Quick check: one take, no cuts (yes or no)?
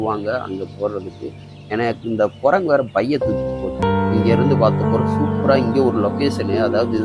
no